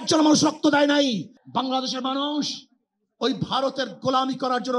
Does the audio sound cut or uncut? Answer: cut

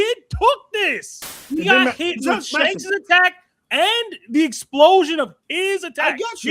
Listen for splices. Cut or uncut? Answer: cut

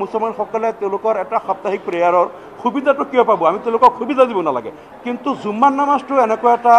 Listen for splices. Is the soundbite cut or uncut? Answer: cut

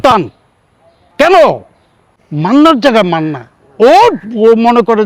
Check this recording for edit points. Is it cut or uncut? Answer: cut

